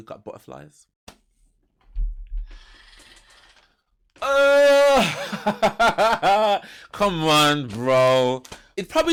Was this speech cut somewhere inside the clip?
no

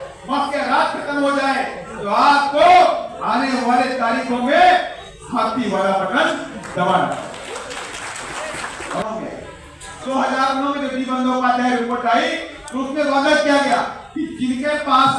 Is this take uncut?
no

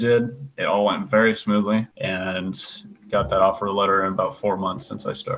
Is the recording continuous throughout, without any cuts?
yes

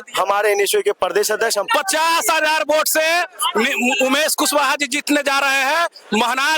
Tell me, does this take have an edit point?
yes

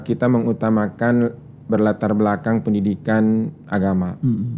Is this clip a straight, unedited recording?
yes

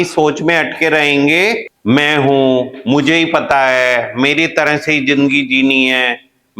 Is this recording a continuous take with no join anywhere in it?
no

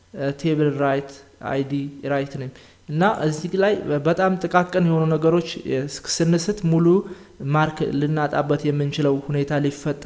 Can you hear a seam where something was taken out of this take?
no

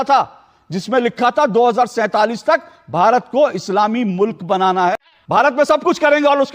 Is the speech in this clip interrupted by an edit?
yes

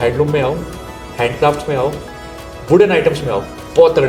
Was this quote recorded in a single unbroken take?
yes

